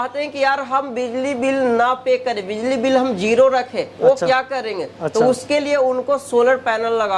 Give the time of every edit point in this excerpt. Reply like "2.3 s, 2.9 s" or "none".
none